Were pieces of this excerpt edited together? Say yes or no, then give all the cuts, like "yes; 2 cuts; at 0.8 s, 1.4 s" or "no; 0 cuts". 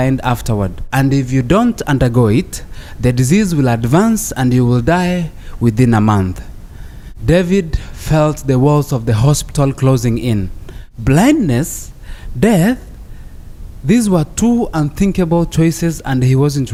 no; 0 cuts